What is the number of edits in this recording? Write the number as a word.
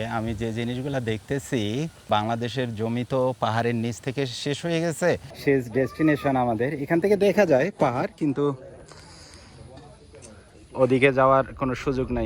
two